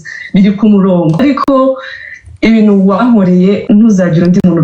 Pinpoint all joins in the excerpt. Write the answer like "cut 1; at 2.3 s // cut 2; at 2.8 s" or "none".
cut 1; at 1.2 s // cut 2; at 3.6 s